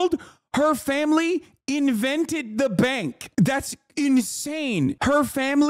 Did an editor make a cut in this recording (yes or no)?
no